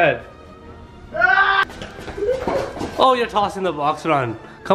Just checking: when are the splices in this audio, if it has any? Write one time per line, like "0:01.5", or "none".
0:01.6